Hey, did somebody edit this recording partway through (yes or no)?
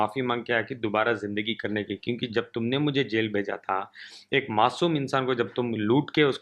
no